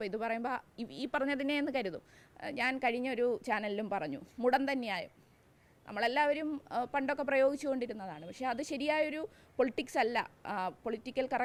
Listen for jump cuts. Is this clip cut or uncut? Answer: uncut